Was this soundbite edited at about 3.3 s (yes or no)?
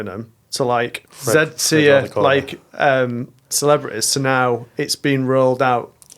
no